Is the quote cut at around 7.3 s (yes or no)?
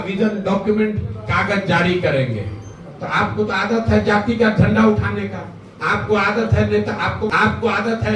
yes